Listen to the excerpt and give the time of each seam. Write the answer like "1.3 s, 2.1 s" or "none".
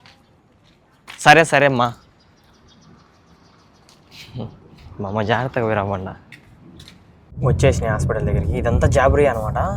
7.3 s